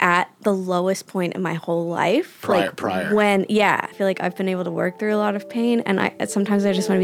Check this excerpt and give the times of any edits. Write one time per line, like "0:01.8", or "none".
0:03.9